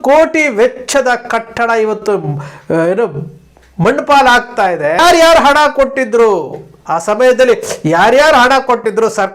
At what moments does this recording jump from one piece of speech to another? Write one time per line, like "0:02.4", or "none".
0:05.0